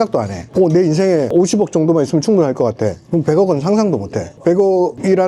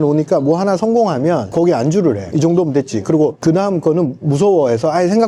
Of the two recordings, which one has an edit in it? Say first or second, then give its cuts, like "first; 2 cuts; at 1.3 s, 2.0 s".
second; 3 cuts; at 1.5 s, 2.2 s, 3.4 s